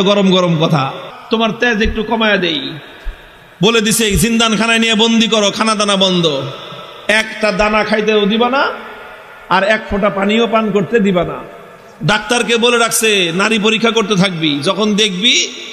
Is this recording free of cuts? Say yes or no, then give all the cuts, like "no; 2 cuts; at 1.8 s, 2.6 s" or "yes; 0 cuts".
no; 1 cut; at 1.1 s